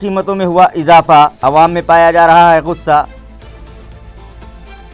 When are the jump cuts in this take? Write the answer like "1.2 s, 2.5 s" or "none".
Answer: none

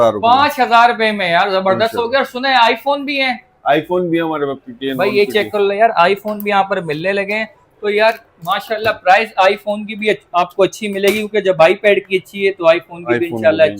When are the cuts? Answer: none

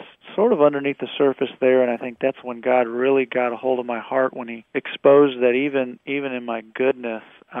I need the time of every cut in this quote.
4.5 s

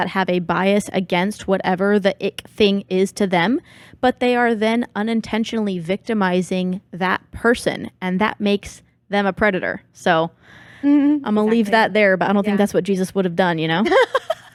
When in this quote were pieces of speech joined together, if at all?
none

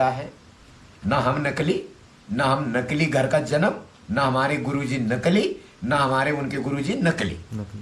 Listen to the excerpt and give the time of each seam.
none

